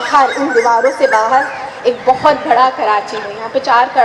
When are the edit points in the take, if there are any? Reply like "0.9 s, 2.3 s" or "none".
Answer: none

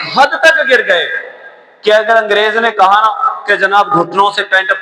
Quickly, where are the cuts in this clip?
none

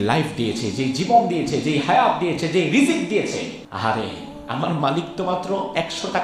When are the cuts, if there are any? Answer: 3.6 s

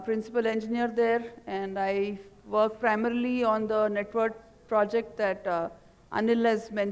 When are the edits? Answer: none

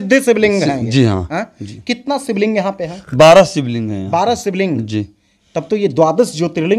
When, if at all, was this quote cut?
none

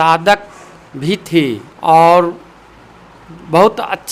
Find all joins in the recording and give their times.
1.7 s

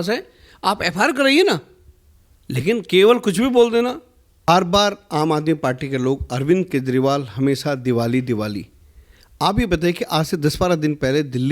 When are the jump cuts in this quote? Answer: 4.5 s

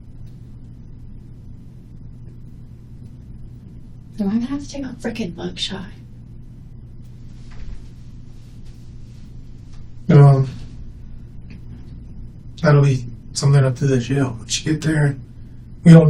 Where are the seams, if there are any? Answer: none

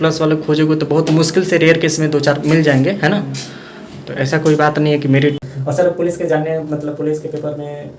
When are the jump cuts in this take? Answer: 5.5 s

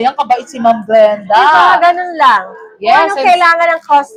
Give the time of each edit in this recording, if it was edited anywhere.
none

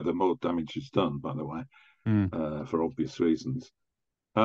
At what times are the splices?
none

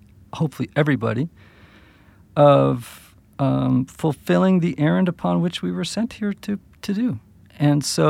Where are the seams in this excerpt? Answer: none

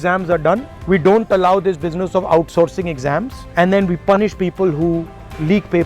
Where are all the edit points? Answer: none

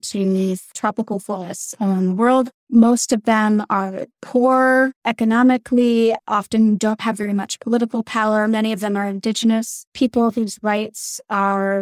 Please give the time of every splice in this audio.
none

